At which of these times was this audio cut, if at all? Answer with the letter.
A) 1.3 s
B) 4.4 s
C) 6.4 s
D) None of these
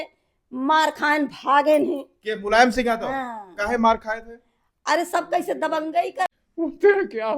C